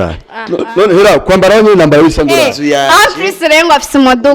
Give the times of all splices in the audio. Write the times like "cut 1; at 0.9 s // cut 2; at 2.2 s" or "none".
cut 1; at 2.6 s